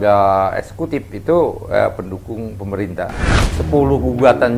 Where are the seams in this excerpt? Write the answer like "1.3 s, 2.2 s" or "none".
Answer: 3.6 s